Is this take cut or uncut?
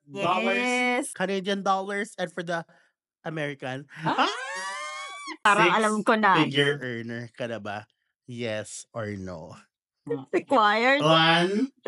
cut